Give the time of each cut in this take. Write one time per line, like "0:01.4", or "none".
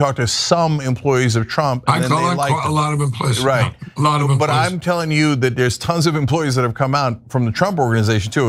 none